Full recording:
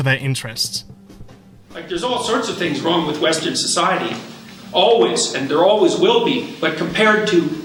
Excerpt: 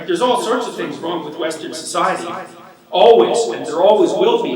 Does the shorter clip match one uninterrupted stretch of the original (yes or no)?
yes